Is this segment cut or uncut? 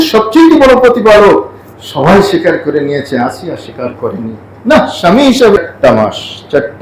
cut